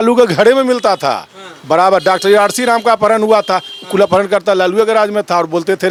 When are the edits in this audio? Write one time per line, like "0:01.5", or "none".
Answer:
none